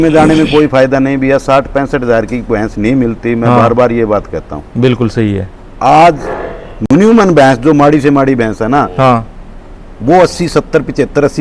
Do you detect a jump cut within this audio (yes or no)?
no